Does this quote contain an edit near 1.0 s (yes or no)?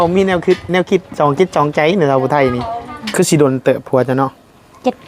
no